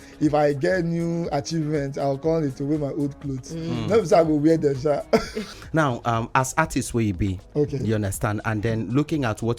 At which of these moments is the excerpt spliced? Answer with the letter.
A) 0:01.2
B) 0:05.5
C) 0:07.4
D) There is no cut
B